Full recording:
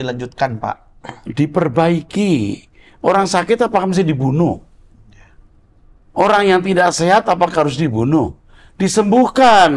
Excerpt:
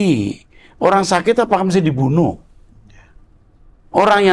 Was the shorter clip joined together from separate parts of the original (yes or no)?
no